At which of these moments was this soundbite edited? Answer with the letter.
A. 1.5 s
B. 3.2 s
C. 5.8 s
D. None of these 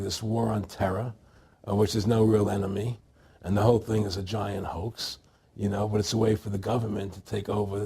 C